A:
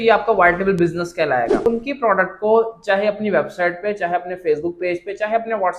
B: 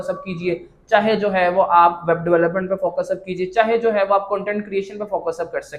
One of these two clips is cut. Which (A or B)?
A